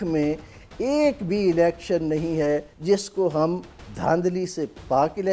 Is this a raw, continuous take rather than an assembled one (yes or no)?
no